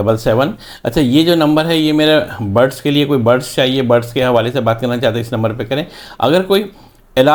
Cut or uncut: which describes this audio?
uncut